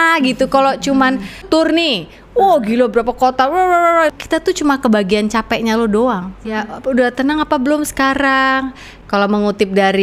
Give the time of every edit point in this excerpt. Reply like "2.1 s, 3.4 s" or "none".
1.4 s, 4.1 s, 6.6 s